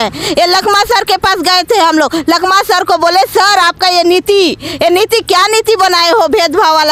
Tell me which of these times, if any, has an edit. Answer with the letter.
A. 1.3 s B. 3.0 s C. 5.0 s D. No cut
D